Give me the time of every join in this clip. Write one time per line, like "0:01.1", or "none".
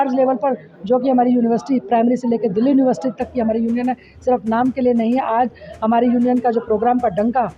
none